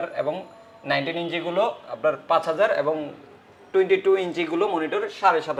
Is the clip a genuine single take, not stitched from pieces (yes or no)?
yes